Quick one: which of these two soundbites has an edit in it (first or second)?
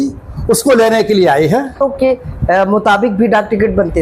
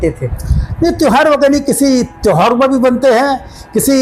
first